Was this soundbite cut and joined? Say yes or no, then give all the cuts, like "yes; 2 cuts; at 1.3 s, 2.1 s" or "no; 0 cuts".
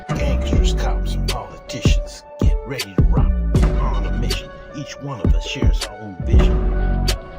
no; 0 cuts